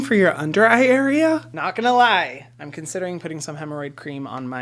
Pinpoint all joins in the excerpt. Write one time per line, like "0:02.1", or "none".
0:01.5